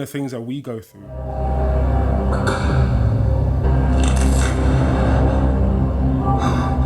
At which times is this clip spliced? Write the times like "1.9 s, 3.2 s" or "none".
3.6 s